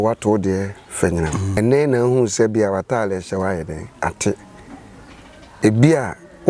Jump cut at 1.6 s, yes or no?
yes